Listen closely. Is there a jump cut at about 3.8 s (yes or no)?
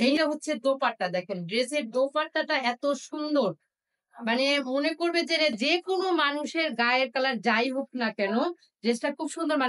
no